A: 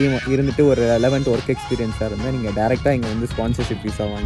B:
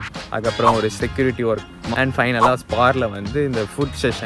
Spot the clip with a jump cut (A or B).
B